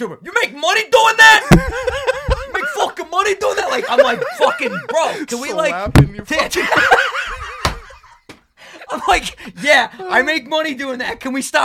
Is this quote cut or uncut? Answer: uncut